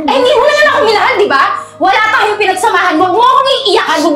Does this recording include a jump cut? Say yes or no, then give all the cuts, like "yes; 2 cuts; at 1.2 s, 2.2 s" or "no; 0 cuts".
no; 0 cuts